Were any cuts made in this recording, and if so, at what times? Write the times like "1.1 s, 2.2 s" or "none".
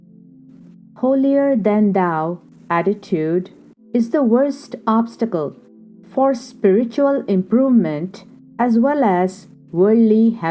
0.9 s

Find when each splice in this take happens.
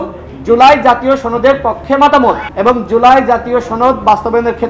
2.5 s

